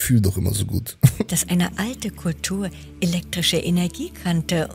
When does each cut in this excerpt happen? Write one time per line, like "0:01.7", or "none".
0:01.3